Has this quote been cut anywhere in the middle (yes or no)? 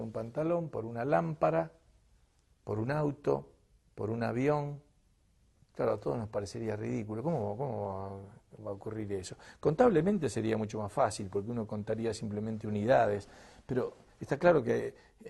no